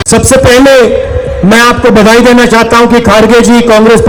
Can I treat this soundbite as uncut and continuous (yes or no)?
yes